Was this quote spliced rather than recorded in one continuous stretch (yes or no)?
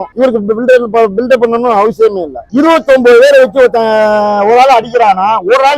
yes